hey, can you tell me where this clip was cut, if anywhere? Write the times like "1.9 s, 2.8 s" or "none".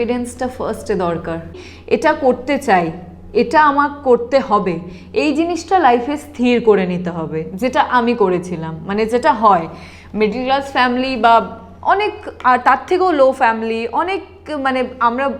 1.5 s